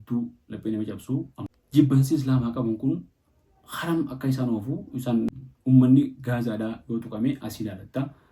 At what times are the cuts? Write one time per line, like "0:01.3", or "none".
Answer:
0:01.4
0:05.3